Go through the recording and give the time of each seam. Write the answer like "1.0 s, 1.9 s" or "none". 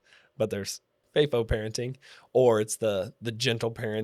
1.0 s